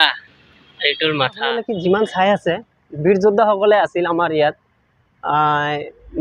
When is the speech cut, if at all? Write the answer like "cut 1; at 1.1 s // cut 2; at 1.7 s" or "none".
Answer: cut 1; at 1.6 s